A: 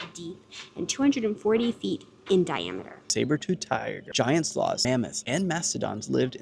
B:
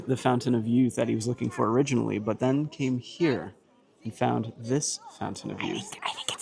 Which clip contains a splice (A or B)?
A